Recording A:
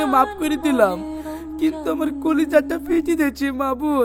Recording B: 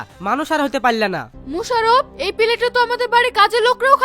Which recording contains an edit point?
B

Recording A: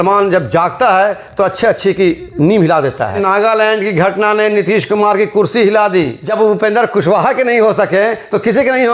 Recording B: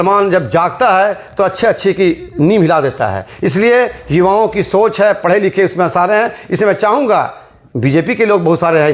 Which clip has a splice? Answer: A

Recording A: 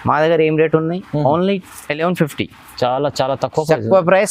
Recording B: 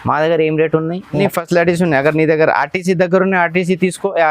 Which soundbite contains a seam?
B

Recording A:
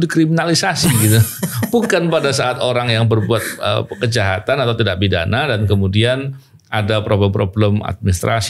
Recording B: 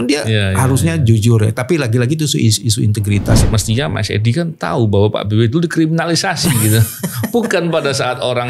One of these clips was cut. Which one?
B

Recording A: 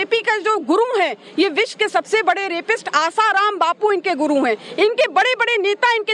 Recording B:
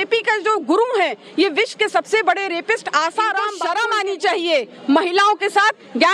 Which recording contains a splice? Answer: B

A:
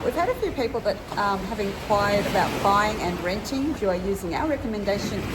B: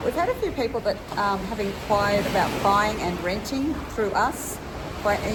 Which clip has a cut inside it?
A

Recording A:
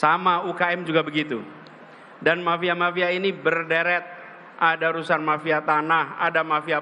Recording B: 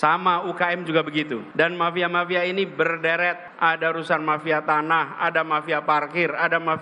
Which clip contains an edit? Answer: B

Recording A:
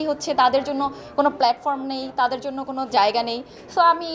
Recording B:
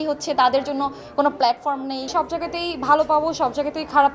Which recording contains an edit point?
B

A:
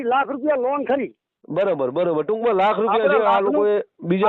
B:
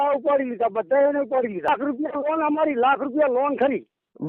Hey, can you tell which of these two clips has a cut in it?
B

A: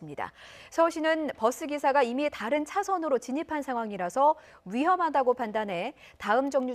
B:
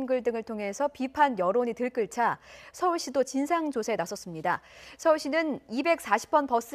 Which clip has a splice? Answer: A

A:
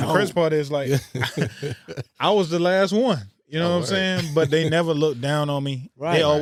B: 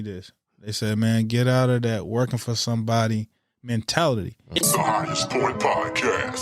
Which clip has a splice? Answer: B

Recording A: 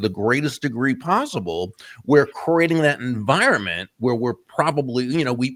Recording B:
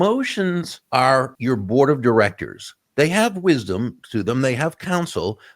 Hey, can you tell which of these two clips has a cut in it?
B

